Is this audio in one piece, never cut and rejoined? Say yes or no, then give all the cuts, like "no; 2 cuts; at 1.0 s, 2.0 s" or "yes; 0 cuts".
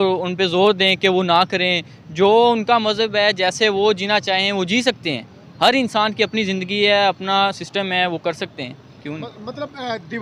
yes; 0 cuts